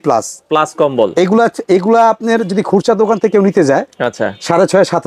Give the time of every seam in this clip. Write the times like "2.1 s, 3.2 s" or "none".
none